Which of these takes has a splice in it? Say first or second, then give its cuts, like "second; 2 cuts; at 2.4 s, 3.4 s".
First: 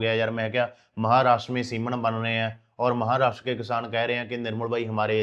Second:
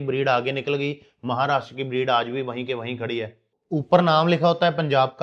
second; 1 cut; at 3.5 s